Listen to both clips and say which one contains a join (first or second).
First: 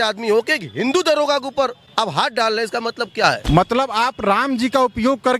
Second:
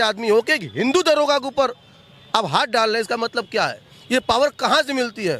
first